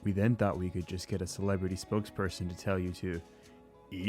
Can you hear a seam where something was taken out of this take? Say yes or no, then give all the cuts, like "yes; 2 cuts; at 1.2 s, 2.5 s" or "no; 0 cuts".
yes; 1 cut; at 0.9 s